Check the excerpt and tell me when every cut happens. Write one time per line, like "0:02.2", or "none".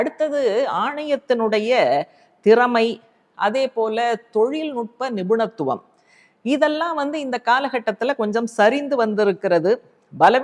none